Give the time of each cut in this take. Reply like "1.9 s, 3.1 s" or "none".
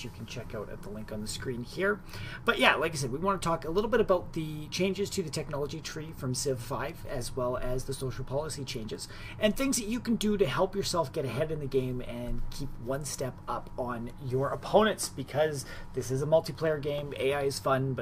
2.6 s